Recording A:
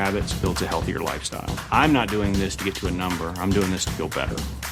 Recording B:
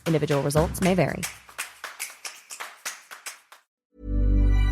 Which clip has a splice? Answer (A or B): B